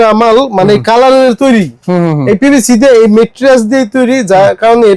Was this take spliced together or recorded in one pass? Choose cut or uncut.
uncut